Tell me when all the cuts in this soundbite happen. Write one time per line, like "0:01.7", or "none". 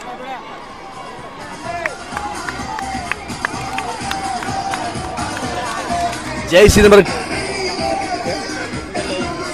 none